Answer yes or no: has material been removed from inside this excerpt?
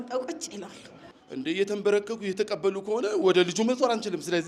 yes